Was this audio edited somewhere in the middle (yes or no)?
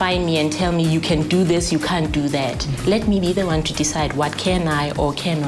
no